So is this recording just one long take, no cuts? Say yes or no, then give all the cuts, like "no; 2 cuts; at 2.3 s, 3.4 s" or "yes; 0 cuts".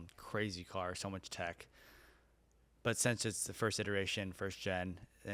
yes; 0 cuts